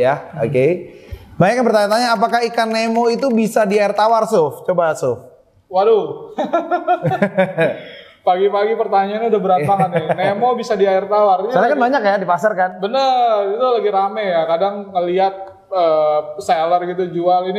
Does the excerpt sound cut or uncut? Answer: uncut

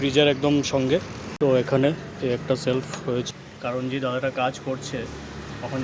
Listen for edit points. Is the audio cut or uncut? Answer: cut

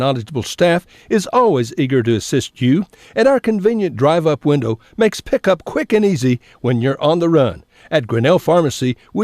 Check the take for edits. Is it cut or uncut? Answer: uncut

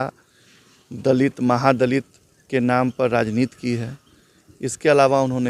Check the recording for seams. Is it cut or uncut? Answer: uncut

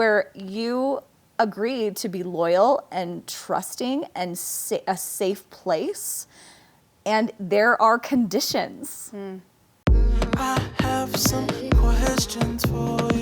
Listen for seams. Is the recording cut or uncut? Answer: cut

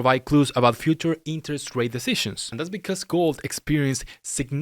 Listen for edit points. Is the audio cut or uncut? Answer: cut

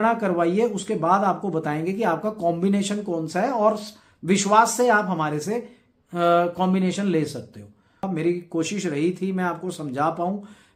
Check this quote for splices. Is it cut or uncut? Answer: cut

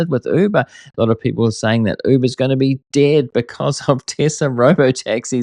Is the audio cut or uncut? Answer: uncut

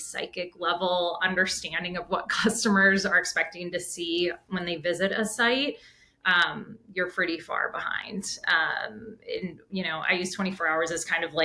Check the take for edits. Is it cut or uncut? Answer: uncut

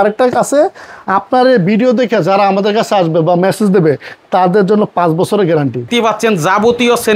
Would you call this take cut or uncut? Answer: cut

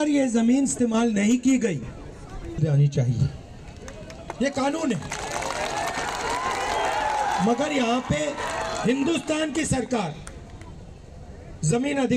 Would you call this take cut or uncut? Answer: uncut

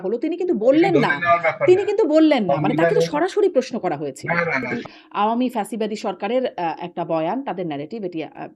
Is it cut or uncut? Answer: cut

